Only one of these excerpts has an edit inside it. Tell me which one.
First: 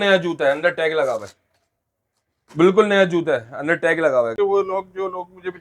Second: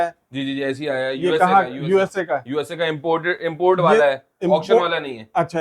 first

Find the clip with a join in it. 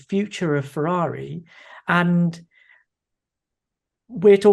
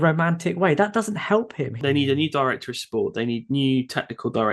second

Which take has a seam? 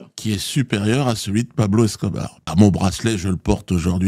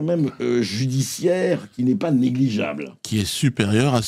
first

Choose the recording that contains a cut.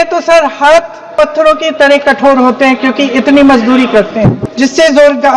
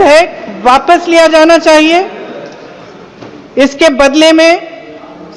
first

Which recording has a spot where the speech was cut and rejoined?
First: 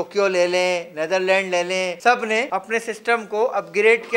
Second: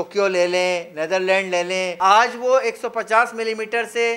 second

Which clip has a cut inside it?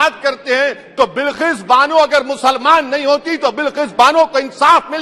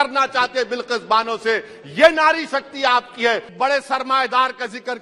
second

